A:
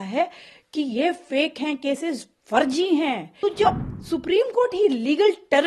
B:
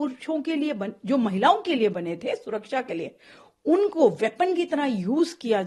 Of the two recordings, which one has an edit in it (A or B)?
A